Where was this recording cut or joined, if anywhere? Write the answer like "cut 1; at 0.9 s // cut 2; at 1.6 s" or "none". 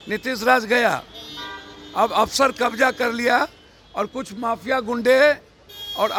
none